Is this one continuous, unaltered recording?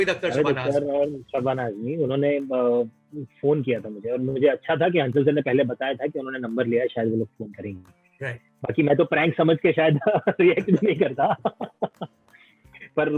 yes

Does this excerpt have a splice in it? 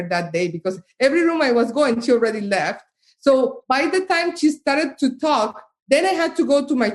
no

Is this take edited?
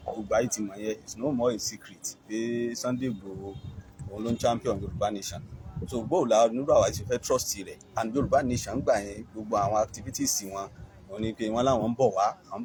no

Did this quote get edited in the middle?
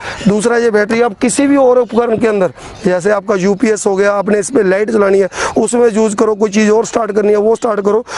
no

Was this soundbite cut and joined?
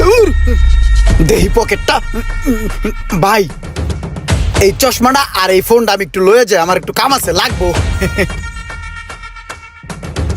no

